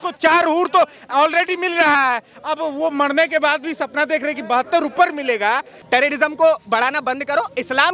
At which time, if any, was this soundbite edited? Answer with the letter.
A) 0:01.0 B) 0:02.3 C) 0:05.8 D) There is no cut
C